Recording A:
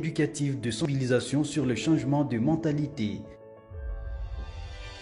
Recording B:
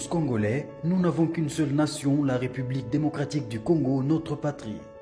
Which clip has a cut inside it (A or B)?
A